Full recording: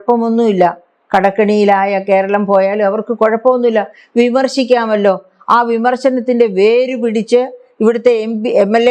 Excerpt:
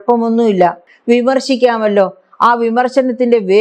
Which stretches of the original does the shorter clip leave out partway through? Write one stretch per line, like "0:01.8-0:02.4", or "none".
0:00.9-0:04.0